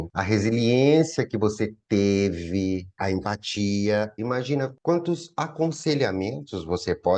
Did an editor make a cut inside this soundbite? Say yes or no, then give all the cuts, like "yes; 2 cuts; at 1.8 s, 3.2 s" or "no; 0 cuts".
yes; 2 cuts; at 3.0 s, 4.3 s